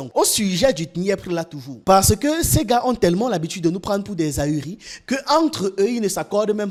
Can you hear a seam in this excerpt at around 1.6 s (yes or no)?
no